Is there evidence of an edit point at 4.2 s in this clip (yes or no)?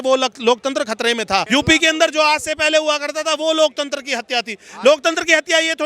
no